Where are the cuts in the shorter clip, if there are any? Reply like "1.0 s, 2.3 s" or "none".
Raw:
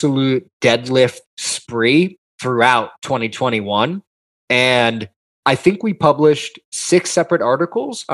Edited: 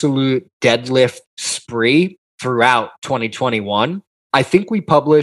4.1 s